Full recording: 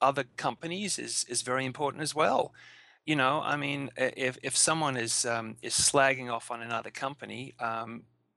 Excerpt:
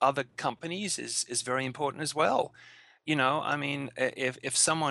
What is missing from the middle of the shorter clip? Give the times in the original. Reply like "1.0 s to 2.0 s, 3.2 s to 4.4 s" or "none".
none